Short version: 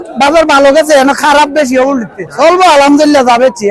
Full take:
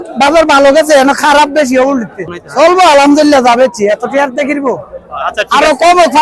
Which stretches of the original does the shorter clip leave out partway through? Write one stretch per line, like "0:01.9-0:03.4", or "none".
0:02.2-0:02.4